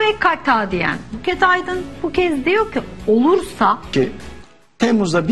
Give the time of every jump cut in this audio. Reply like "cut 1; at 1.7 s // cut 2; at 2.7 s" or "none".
cut 1; at 3.9 s